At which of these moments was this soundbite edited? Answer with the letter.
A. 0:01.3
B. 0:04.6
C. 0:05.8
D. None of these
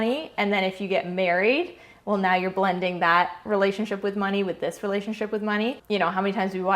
C